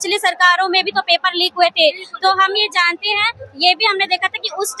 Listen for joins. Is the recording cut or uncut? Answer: uncut